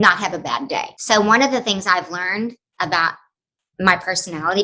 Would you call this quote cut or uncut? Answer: cut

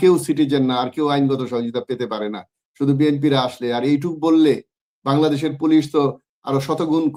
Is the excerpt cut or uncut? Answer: uncut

